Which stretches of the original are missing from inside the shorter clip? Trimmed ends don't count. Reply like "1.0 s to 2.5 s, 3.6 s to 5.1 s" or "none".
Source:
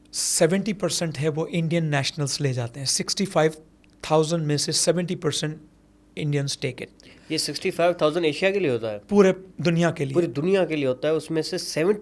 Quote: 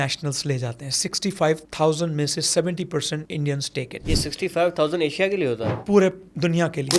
3.6 s to 4.0 s, 5.6 s to 6.1 s, 6.8 s to 7.2 s